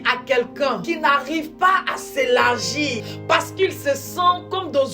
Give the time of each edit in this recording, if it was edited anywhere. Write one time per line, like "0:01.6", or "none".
0:00.8
0:03.1